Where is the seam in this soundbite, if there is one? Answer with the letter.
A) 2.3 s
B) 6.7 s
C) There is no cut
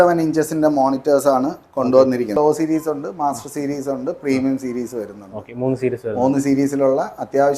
A